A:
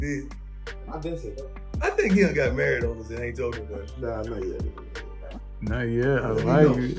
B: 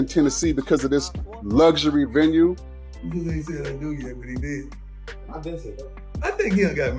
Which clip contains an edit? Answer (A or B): B